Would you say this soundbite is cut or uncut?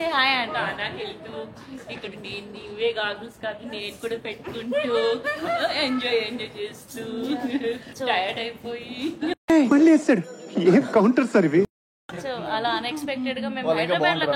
uncut